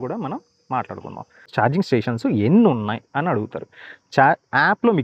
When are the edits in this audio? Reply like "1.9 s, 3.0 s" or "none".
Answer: 1.4 s